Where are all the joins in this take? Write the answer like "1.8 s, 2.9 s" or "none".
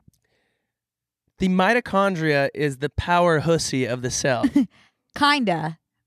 none